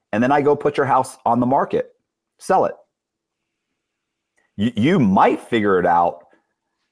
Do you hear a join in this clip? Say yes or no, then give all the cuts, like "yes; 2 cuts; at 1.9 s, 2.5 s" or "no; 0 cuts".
no; 0 cuts